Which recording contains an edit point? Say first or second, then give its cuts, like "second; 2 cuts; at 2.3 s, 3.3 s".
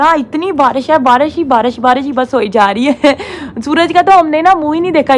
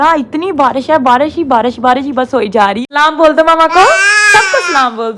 second; 1 cut; at 2.8 s